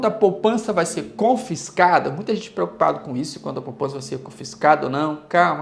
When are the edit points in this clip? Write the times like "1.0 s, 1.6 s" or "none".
none